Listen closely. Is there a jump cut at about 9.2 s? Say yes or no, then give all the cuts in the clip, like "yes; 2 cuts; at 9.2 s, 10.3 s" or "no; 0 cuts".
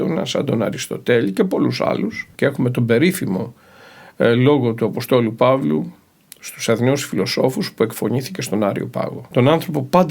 yes; 2 cuts; at 2.3 s, 9.2 s